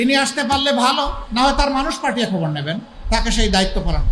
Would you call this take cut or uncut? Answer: cut